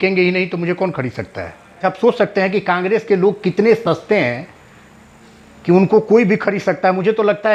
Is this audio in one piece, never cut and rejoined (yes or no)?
no